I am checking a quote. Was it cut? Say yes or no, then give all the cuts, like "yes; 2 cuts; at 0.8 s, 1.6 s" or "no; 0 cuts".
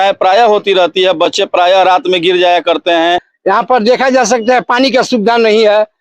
yes; 1 cut; at 3.3 s